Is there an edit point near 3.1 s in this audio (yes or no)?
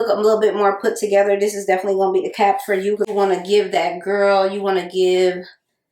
yes